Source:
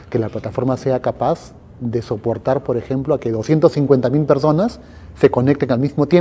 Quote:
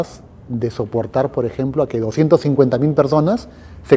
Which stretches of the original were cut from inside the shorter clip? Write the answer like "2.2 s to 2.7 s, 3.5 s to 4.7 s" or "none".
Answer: none